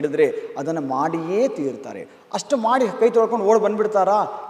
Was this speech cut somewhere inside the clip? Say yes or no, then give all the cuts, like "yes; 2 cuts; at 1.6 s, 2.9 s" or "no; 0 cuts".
no; 0 cuts